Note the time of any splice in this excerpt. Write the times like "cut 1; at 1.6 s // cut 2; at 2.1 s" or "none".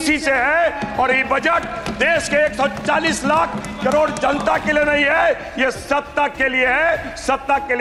none